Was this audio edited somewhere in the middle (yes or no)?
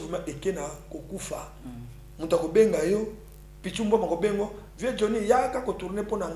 no